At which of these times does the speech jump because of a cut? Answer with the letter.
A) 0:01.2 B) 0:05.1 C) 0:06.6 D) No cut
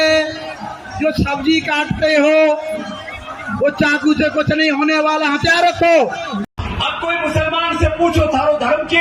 C